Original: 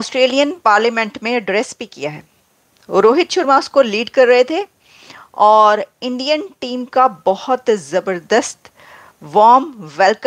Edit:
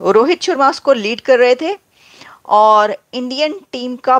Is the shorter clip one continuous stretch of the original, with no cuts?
yes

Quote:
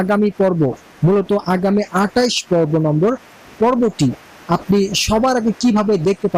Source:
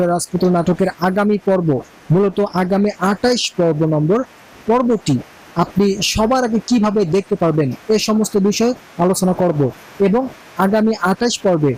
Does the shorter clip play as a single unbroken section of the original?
yes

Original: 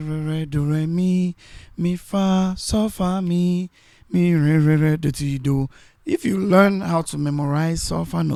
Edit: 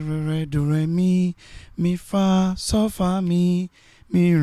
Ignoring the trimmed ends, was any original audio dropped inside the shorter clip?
no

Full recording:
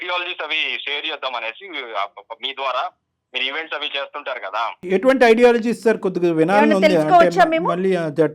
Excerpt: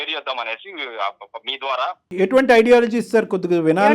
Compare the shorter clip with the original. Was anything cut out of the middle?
yes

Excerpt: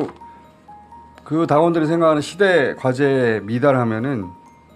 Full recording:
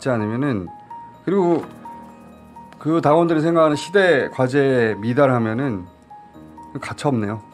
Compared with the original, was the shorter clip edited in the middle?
no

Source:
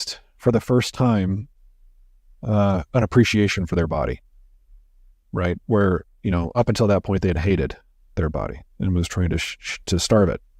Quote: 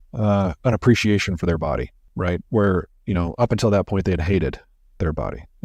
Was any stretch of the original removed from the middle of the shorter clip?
yes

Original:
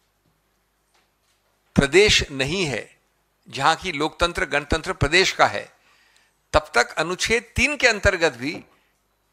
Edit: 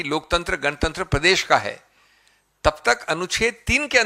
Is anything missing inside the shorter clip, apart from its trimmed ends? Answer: no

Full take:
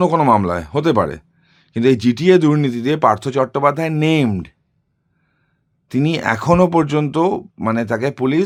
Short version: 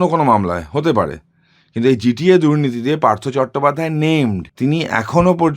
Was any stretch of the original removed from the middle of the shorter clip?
yes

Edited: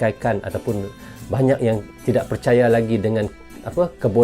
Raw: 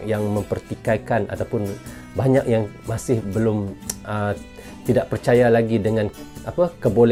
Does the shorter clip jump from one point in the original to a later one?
yes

